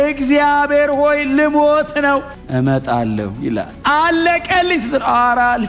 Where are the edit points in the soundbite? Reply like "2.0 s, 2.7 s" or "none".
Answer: none